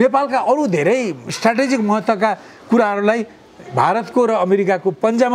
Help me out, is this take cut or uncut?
cut